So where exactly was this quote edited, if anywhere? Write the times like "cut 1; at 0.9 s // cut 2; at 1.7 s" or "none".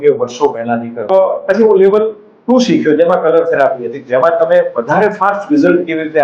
cut 1; at 1.1 s